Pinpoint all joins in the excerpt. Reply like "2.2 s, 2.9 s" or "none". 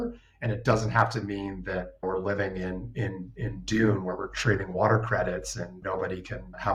none